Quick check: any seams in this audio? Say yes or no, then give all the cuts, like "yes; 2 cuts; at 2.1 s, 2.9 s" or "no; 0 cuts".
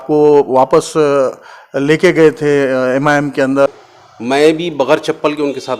yes; 1 cut; at 3.7 s